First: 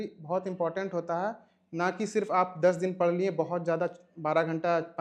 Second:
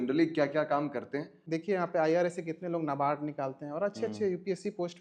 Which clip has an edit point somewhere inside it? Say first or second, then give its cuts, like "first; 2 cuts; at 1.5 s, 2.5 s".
second; 1 cut; at 1.4 s